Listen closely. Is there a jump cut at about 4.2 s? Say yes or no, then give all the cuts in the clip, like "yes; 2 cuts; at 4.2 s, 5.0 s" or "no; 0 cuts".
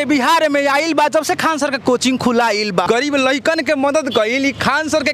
no; 1 cut; at 2.9 s